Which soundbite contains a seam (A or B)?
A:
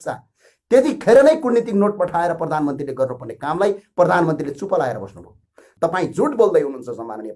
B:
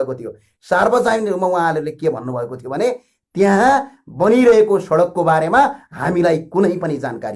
A